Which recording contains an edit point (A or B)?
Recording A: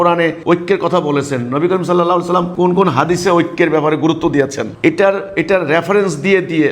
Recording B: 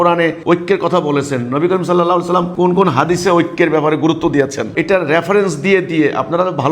B